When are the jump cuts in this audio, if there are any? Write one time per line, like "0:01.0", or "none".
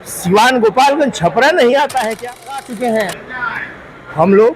0:02.7